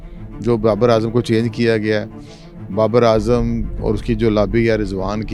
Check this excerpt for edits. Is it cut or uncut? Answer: uncut